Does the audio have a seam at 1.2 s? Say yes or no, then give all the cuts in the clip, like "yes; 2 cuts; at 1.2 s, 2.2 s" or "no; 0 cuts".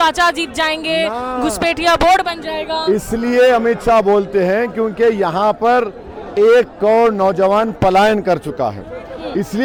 no; 0 cuts